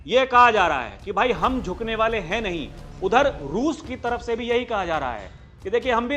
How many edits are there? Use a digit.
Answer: 0